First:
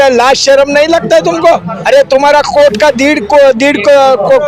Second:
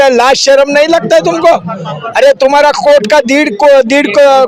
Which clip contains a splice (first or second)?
first